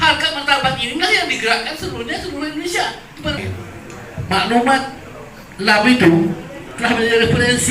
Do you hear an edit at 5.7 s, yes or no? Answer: no